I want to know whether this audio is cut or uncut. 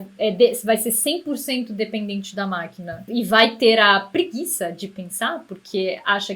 cut